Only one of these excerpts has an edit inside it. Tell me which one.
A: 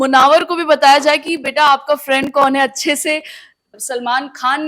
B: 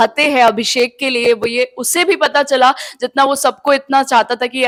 A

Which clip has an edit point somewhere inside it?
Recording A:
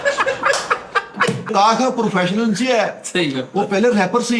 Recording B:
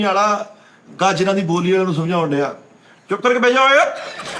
A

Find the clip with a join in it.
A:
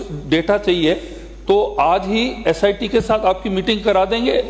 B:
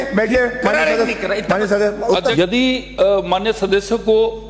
B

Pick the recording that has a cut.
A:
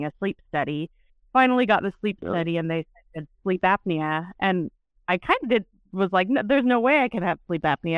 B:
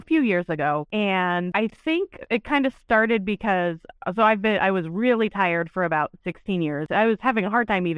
B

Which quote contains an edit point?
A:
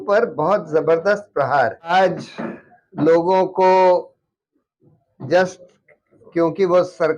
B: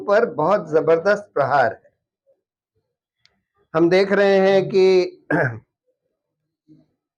A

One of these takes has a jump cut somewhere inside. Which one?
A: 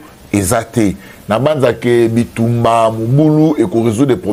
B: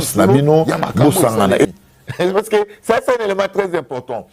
B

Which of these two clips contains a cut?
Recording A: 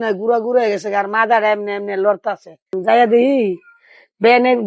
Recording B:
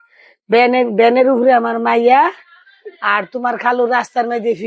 A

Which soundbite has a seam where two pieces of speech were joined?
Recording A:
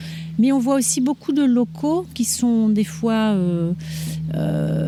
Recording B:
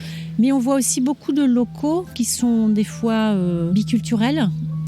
B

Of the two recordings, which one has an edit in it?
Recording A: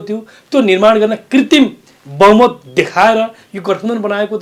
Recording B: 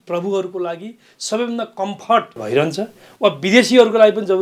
B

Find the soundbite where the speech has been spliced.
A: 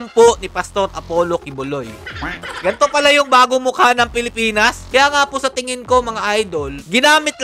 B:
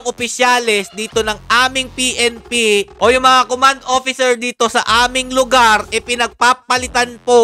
A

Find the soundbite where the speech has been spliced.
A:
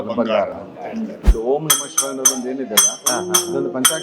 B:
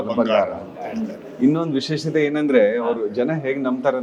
A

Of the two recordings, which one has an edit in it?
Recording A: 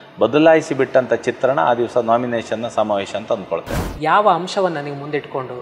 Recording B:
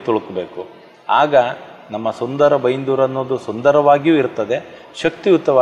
A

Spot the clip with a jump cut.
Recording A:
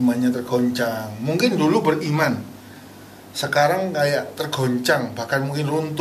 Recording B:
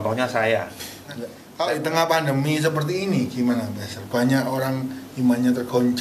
B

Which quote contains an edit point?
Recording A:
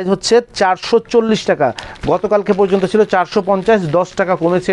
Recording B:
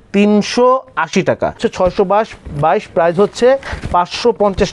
B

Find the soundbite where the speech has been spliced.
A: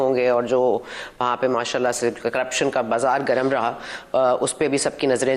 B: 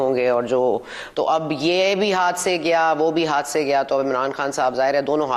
B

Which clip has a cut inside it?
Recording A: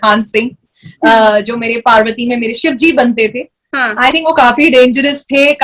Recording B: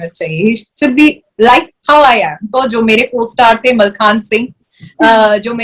B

